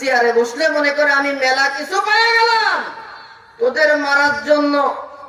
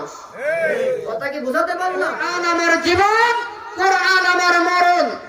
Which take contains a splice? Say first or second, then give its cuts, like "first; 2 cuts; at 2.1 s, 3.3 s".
second; 1 cut; at 2.2 s